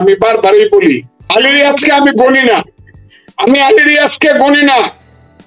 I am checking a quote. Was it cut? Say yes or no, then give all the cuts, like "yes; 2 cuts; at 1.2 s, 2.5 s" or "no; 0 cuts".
yes; 1 cut; at 1.2 s